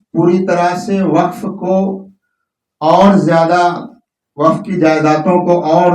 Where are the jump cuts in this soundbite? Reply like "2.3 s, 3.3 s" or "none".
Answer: none